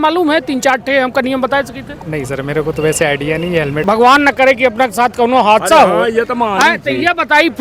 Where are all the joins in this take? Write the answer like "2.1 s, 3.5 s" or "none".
3.8 s

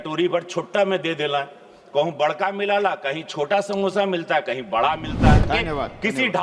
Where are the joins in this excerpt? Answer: 5.4 s

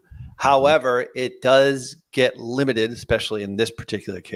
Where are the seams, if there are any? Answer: none

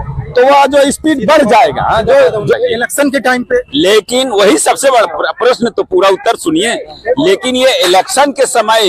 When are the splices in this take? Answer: 2.5 s

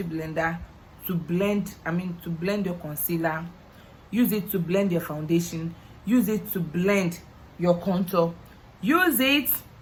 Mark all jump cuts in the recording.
none

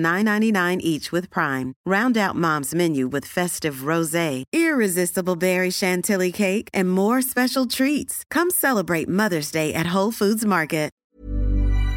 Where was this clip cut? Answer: 11.0 s

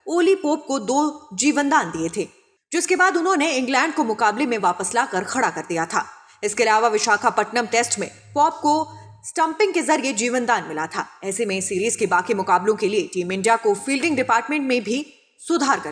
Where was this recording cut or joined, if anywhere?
7.9 s

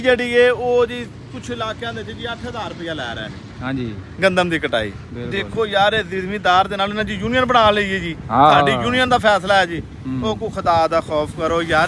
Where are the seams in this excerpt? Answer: none

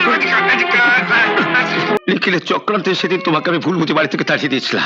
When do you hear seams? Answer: 2.0 s

